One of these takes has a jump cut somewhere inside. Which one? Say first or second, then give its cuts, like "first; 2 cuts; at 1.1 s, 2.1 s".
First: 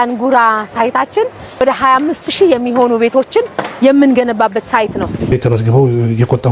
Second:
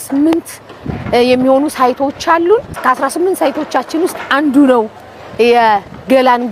first; 2 cuts; at 1.6 s, 5.3 s